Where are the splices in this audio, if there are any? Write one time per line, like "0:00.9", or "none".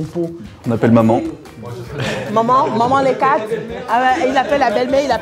none